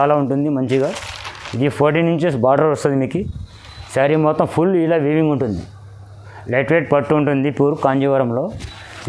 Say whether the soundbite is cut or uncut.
uncut